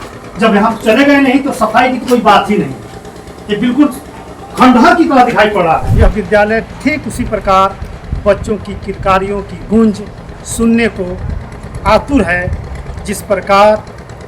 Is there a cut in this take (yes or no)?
yes